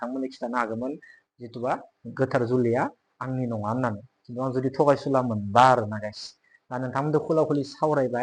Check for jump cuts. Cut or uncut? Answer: uncut